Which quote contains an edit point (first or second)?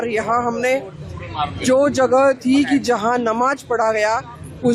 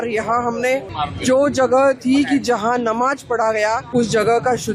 second